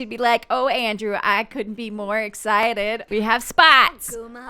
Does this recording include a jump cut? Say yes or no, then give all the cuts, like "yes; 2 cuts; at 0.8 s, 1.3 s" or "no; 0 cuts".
yes; 1 cut; at 3.0 s